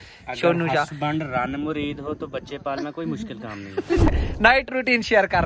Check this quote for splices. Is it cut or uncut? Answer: cut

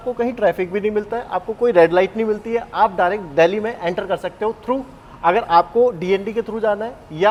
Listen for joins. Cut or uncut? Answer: uncut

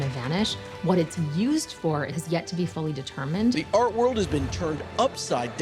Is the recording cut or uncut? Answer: cut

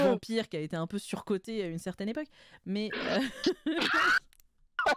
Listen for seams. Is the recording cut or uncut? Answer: uncut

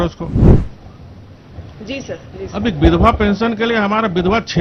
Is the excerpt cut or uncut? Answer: uncut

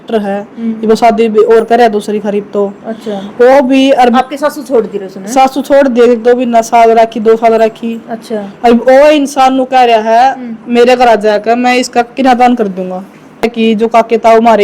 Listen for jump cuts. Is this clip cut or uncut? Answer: cut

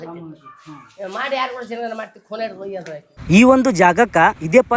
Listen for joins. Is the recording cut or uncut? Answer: cut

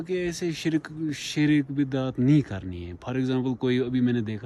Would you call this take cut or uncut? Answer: uncut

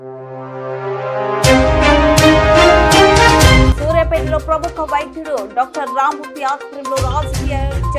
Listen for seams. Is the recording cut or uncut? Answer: cut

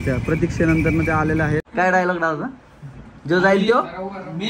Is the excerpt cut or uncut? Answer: cut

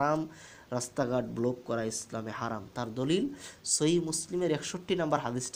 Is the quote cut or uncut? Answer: uncut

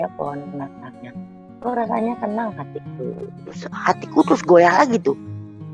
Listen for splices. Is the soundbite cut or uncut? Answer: cut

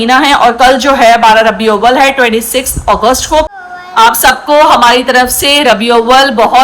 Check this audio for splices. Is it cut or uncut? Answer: cut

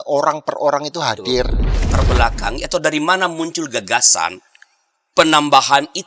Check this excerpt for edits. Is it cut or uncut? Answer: cut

